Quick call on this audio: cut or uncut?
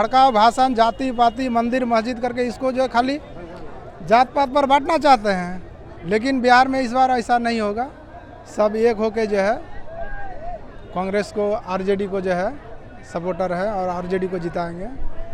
uncut